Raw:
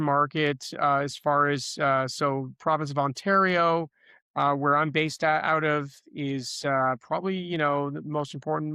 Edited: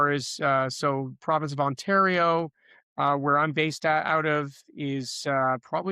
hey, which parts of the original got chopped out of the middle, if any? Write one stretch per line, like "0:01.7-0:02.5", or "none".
none